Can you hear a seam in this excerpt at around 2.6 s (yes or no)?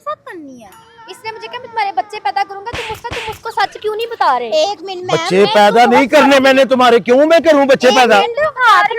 no